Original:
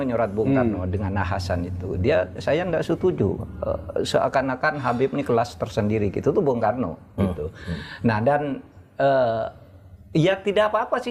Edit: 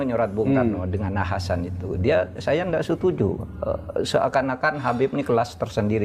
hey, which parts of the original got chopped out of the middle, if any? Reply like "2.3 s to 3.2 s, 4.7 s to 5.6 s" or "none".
none